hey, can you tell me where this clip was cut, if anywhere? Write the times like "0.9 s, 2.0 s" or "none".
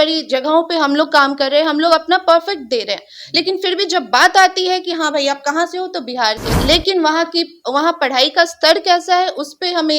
6.5 s